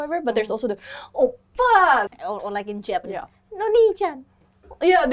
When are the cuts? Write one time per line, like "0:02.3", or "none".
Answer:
0:02.1